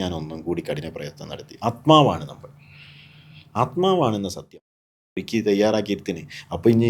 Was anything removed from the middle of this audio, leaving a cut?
yes; 1 cut; at 5.2 s

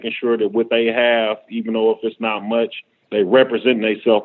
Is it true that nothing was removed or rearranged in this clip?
no; 1 cut; at 3.0 s

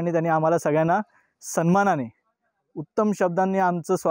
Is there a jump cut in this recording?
no; 0 cuts

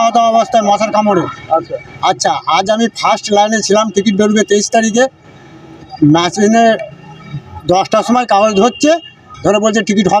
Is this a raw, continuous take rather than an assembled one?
yes; 0 cuts

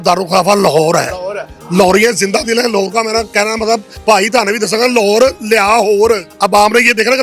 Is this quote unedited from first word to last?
no; 2 cuts; at 3.9 s, 6.3 s

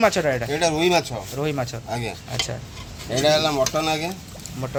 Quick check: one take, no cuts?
yes; 0 cuts

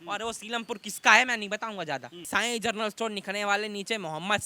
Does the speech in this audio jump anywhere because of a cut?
yes; 1 cut; at 2.2 s

